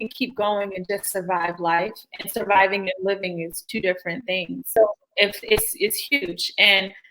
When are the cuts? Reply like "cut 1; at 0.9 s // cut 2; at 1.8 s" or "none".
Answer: cut 1; at 4.7 s